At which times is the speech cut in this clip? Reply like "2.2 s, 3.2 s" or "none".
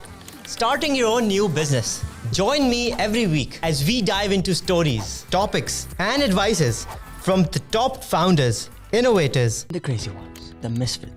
none